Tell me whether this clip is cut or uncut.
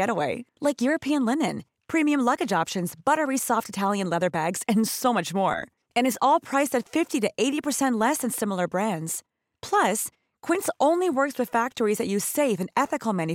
uncut